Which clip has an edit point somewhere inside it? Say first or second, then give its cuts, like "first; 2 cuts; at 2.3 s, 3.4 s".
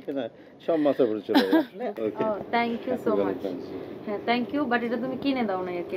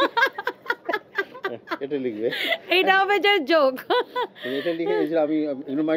first; 1 cut; at 1.8 s